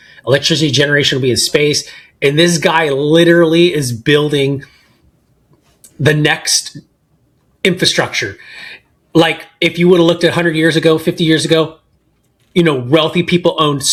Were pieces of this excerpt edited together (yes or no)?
no